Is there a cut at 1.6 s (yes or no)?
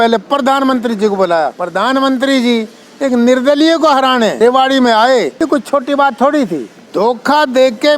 yes